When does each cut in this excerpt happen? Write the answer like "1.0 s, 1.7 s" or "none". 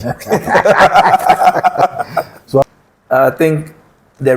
2.6 s